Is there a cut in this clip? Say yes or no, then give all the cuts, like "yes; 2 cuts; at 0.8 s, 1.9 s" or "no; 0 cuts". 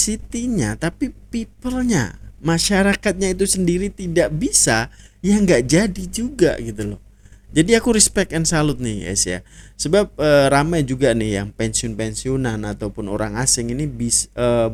no; 0 cuts